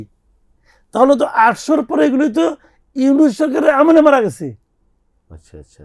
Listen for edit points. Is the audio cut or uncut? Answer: uncut